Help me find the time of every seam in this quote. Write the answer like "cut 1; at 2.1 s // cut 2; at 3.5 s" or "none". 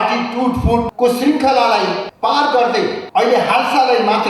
cut 1; at 0.9 s // cut 2; at 2.1 s // cut 3; at 3.0 s